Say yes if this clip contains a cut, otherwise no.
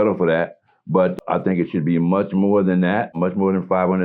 yes